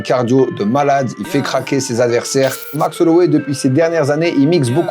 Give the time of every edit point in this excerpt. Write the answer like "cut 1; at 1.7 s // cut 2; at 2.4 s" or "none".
cut 1; at 2.8 s